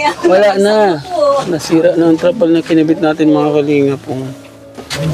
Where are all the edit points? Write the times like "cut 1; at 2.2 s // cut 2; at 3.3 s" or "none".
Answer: none